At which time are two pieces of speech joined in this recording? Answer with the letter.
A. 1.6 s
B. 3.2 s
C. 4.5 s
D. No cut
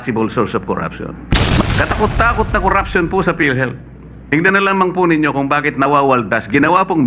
A